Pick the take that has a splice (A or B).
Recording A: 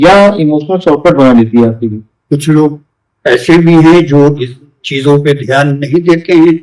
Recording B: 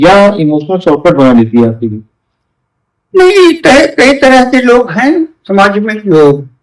A